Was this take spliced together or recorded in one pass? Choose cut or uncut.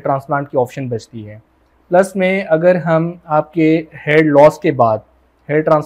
uncut